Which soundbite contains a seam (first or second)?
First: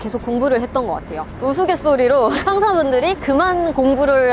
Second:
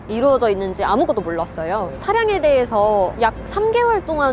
second